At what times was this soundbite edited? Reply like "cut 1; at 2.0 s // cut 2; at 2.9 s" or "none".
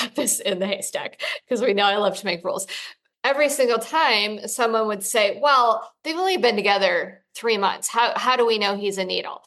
cut 1; at 2.7 s